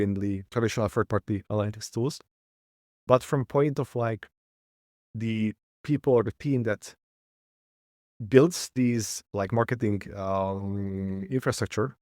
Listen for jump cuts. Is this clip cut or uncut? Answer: uncut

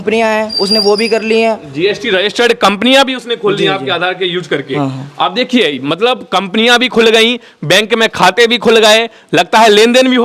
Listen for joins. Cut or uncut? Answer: uncut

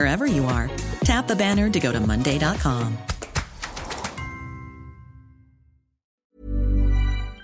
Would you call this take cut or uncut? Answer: cut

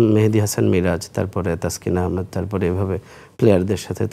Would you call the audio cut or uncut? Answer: uncut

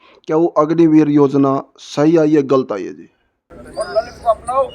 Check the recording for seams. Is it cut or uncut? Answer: cut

